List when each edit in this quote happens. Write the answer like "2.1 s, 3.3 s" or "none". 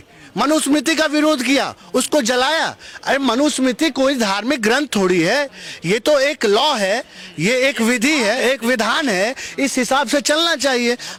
none